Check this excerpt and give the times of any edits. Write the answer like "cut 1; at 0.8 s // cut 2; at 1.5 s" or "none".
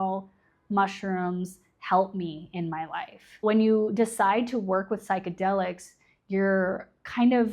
cut 1; at 3.4 s